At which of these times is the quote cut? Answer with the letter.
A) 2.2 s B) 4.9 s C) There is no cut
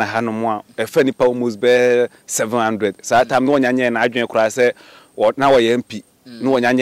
C